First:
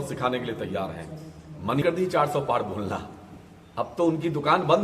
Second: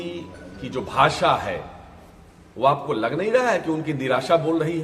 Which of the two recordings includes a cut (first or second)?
first